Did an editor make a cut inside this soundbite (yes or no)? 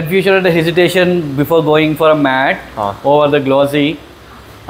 no